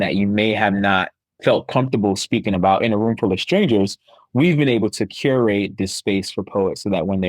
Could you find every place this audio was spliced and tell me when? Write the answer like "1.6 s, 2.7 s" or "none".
1.2 s